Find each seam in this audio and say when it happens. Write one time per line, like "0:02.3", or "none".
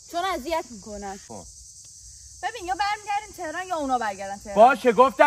0:01.3